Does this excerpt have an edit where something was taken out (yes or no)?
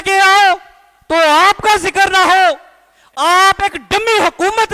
no